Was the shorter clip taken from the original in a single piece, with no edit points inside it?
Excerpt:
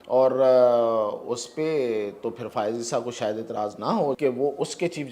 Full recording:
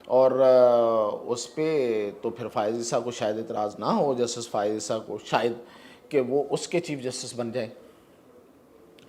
no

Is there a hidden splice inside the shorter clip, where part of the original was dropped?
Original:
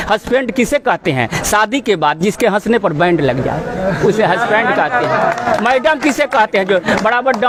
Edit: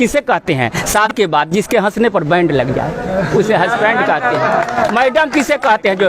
yes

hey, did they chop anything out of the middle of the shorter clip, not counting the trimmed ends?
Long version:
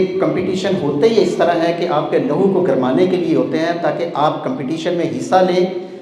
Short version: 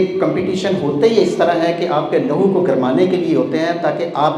no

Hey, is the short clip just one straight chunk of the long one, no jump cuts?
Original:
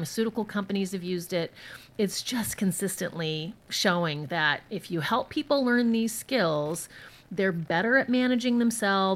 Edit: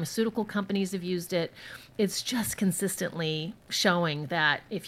yes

